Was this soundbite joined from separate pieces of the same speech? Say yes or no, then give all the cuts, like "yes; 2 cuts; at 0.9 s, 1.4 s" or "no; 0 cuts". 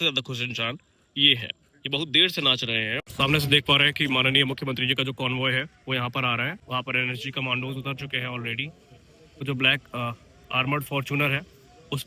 yes; 3 cuts; at 3.0 s, 6.6 s, 9.4 s